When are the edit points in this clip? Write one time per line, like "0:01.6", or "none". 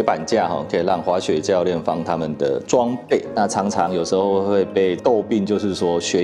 0:03.3
0:05.0

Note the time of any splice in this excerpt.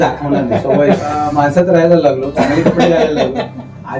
0:01.1

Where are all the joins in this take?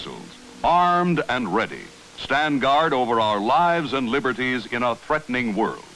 none

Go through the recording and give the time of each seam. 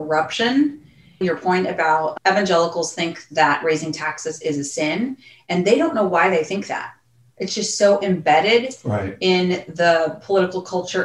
0:01.2
0:02.2

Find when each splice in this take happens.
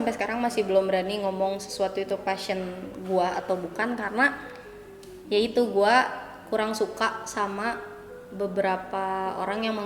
none

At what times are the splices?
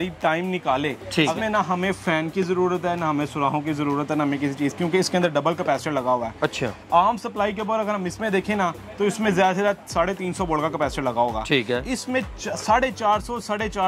0:01.3

